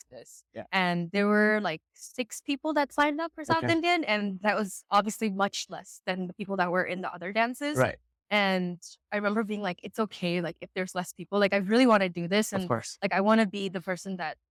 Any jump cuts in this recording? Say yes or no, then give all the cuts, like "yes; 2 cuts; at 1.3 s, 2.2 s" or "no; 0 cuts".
no; 0 cuts